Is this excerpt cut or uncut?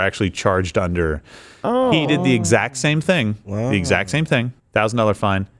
cut